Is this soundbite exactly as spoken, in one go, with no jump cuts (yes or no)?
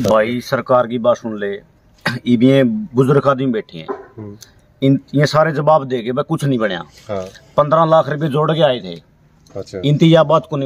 yes